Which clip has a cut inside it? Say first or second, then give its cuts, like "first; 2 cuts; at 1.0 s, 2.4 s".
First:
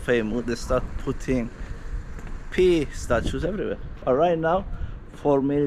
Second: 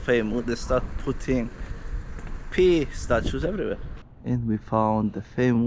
second; 1 cut; at 3.9 s